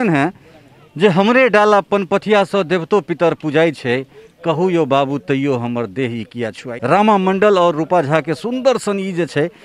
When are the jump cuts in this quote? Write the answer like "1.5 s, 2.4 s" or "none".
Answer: 6.7 s